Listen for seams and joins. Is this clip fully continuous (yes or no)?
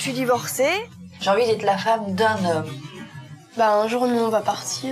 no